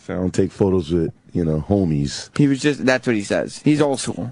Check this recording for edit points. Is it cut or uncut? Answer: uncut